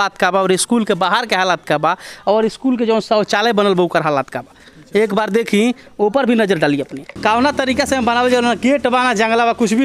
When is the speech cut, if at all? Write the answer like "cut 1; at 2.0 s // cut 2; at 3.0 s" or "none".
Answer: cut 1; at 7.2 s